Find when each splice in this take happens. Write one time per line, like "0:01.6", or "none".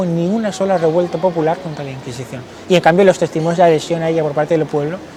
none